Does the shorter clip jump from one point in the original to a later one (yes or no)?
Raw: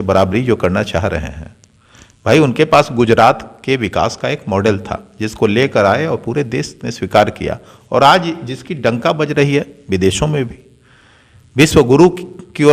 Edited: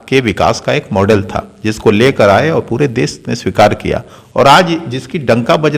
no